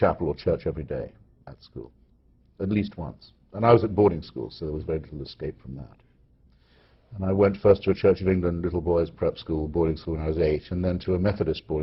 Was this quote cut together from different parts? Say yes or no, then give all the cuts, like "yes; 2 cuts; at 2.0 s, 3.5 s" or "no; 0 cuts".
no; 0 cuts